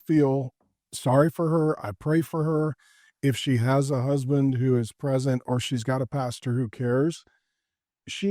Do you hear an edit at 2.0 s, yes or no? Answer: no